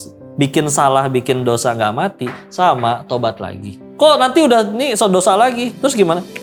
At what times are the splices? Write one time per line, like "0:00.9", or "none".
none